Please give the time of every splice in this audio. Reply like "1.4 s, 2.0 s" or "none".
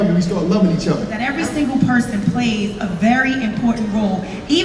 1.3 s